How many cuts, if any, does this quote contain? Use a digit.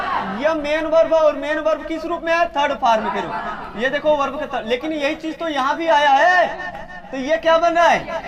0